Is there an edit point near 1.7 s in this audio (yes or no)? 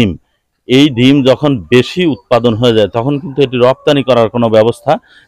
no